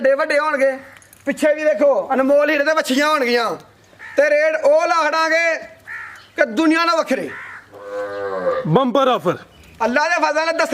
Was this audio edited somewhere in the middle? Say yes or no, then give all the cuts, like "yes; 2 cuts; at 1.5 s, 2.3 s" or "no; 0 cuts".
no; 0 cuts